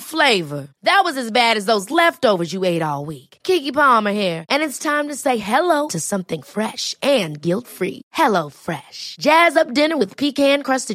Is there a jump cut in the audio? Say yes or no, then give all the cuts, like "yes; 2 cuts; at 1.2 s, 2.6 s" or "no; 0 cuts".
no; 0 cuts